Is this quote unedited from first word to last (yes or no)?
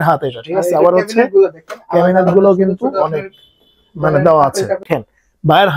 no